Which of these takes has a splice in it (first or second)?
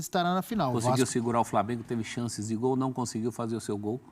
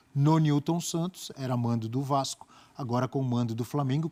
first